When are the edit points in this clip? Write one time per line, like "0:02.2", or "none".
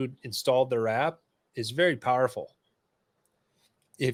none